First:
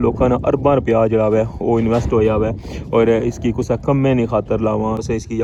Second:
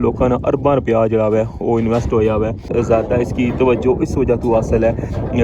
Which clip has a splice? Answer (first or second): second